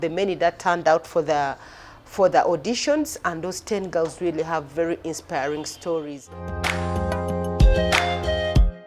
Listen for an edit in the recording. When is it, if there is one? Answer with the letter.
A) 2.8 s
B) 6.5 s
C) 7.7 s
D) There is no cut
B